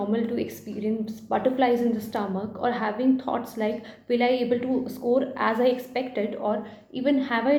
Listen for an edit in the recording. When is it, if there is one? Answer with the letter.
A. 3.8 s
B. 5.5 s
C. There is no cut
C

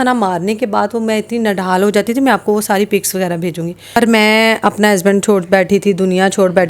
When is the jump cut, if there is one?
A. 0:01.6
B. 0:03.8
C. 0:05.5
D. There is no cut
B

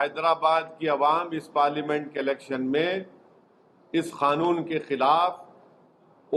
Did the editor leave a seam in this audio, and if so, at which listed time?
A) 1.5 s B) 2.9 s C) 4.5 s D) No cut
D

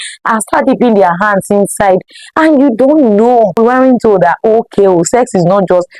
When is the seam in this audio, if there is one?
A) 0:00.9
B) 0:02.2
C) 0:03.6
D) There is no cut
C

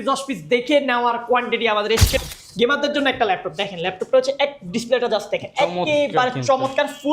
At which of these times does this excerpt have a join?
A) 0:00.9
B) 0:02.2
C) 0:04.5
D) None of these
B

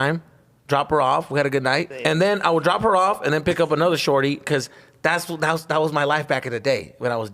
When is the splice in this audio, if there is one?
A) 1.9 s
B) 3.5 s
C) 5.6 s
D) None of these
A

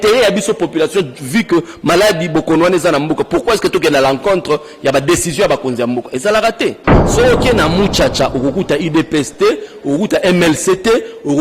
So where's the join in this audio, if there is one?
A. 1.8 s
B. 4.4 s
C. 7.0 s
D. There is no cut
C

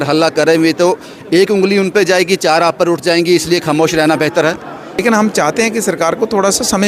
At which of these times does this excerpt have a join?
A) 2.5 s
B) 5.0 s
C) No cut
B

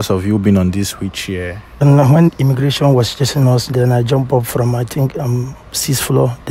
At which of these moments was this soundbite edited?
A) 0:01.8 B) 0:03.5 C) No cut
A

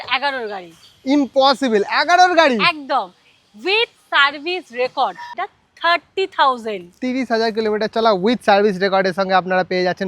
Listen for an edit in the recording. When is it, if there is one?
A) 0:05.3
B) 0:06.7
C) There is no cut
A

